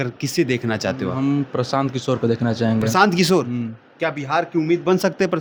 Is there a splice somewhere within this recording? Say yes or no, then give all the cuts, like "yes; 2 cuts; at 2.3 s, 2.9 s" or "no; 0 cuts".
no; 0 cuts